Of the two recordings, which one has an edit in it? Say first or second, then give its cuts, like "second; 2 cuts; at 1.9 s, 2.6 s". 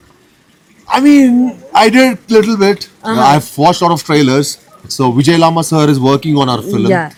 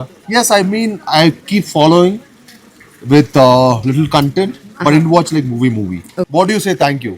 second; 1 cut; at 6.1 s